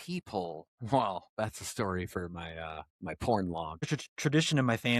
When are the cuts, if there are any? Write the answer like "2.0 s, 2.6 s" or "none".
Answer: 4.0 s